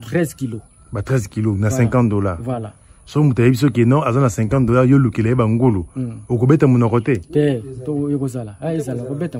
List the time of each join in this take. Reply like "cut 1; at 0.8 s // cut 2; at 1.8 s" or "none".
none

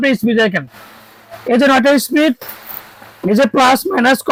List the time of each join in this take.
none

